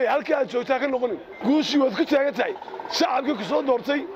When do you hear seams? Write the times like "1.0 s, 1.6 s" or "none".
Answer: 1.3 s